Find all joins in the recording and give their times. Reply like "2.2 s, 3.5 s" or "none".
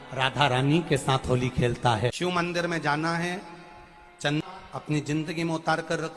2.2 s, 4.4 s